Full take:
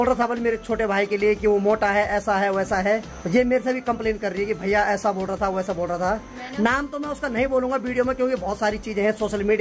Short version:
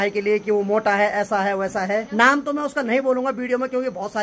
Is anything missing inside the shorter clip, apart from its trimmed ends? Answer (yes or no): yes